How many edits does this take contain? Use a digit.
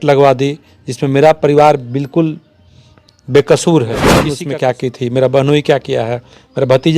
1